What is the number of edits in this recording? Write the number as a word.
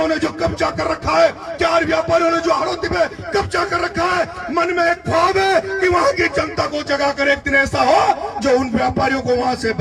zero